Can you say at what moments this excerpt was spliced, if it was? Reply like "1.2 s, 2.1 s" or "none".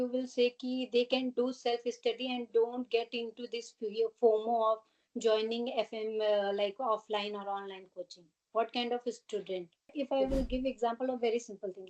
9.9 s